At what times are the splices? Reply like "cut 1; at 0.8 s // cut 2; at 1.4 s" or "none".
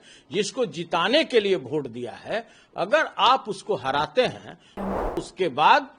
cut 1; at 4.9 s